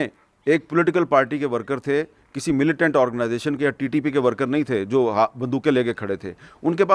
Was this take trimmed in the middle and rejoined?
no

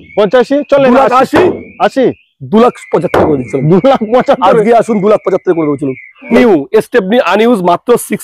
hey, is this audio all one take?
no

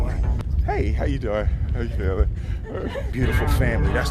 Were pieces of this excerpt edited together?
no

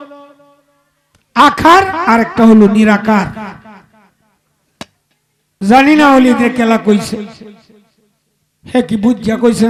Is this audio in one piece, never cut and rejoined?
yes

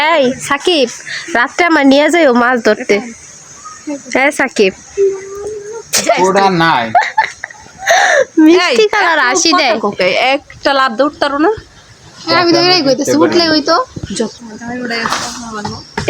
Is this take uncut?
no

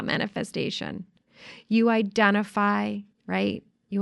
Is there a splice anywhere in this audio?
yes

